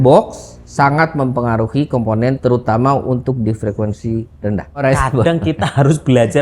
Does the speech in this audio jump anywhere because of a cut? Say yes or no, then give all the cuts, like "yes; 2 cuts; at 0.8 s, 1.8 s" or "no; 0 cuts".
yes; 1 cut; at 4.8 s